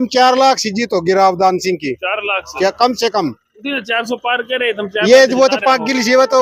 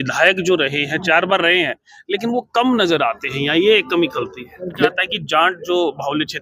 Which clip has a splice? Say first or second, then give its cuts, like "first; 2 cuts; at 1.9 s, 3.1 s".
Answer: second; 1 cut; at 4.9 s